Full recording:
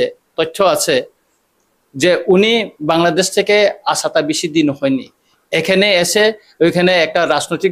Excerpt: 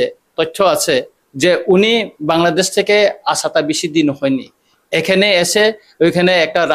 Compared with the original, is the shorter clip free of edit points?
no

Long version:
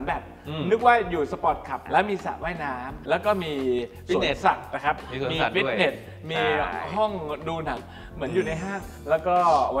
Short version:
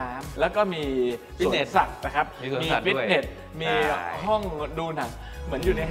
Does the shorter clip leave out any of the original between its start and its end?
no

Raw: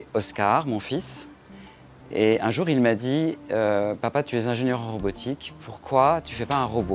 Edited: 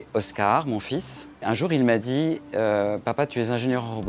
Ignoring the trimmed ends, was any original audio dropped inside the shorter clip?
yes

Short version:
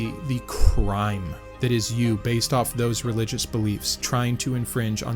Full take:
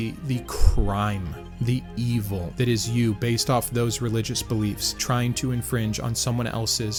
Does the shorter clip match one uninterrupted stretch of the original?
no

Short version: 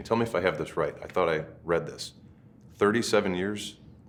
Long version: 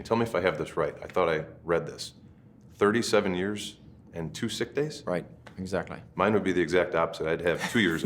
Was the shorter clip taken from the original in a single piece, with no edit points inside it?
yes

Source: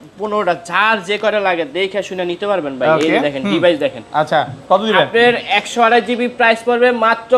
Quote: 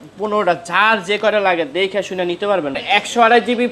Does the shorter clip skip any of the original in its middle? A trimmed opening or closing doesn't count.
yes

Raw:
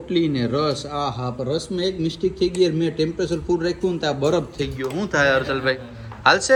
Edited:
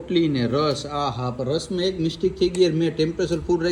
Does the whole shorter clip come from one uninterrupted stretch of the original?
yes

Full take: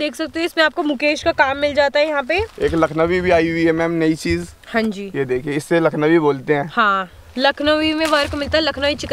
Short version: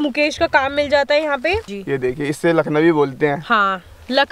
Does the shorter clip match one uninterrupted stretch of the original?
no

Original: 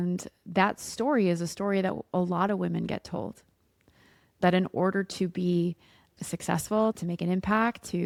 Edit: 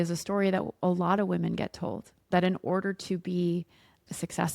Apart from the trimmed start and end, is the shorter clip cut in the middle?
yes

